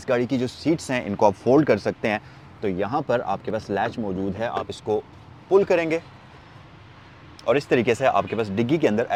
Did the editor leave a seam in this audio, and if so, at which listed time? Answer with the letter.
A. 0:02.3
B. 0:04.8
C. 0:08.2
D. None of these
D